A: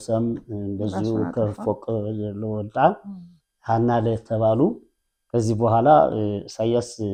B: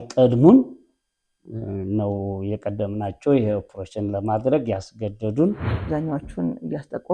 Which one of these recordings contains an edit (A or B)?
B